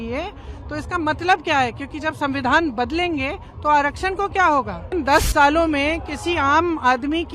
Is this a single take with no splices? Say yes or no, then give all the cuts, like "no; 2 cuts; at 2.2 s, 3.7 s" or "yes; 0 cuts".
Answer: no; 1 cut; at 4.9 s